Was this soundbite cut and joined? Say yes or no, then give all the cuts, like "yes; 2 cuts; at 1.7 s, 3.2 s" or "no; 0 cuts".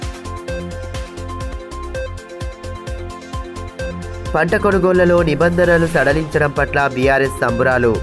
yes; 1 cut; at 1.5 s